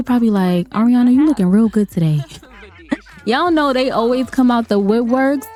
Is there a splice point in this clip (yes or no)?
no